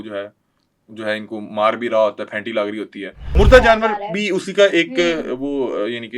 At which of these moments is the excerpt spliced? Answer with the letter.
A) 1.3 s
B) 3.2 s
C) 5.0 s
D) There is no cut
B